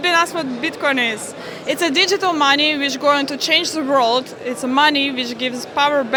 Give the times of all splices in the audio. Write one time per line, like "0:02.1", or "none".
none